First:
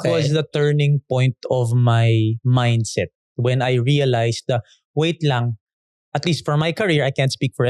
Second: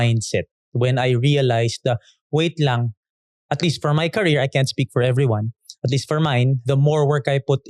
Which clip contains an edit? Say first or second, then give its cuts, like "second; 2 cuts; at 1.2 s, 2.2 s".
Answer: second; 1 cut; at 6.6 s